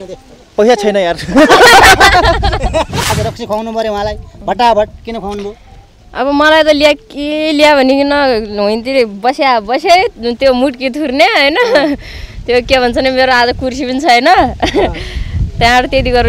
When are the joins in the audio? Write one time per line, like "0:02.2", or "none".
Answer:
0:03.1